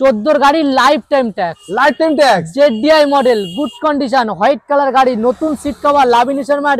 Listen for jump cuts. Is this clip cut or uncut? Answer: uncut